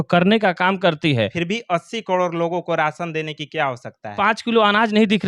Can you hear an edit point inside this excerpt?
yes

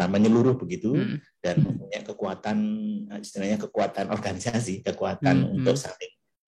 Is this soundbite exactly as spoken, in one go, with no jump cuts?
yes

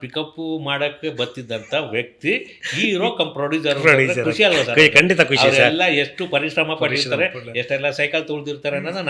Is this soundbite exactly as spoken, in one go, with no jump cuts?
yes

